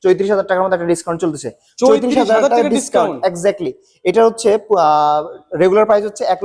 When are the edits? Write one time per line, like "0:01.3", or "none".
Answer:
none

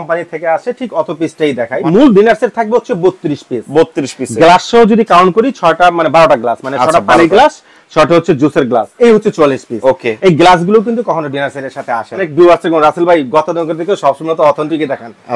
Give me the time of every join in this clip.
0:01.8
0:08.9
0:12.3

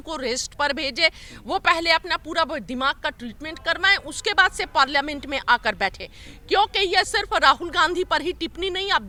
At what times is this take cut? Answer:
none

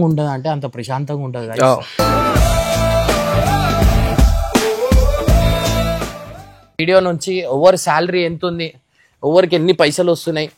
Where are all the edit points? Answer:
0:06.6

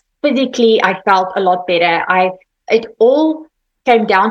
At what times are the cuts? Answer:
0:02.5

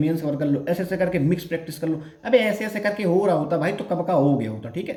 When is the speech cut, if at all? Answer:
none

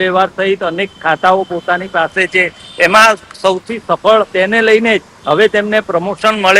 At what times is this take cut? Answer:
0:04.3

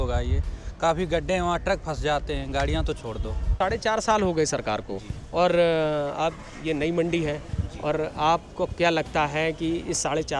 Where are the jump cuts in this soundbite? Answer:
0:03.6

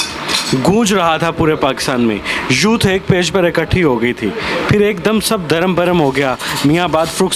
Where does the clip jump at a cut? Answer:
none

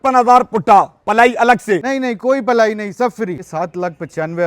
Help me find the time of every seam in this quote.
0:01.8
0:03.5

